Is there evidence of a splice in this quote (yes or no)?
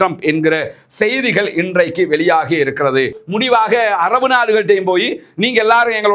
yes